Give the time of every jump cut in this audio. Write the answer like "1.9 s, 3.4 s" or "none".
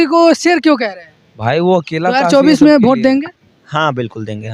2.2 s